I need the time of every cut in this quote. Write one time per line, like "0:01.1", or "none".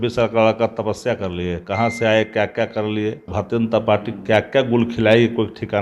0:03.3